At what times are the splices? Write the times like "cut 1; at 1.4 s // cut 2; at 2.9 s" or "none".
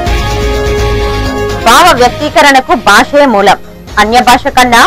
cut 1; at 1.1 s